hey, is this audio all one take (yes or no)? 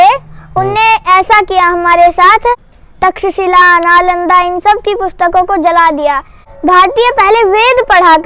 no